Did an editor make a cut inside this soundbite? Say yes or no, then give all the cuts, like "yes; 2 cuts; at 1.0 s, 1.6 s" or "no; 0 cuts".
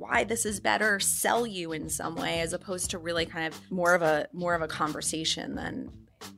yes; 1 cut; at 3.6 s